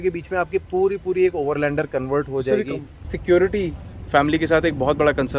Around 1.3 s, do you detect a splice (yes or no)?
no